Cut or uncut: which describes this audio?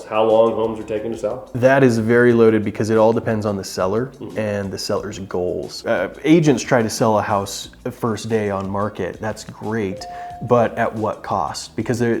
uncut